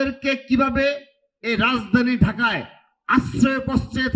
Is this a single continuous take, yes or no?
yes